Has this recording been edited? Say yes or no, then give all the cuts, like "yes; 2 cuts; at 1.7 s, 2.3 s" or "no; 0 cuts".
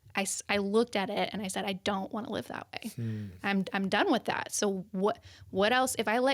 no; 0 cuts